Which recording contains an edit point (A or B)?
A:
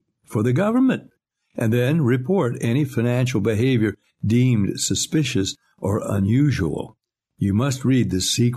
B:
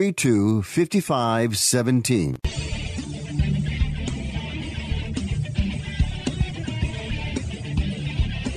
B